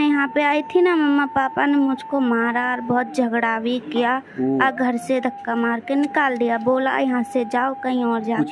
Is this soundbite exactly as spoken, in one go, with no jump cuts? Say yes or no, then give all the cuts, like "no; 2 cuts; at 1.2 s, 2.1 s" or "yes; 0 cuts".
yes; 0 cuts